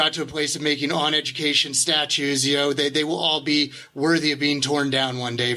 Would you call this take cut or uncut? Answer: uncut